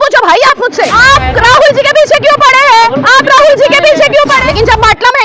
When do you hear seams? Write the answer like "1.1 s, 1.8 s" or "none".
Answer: 0.9 s, 4.4 s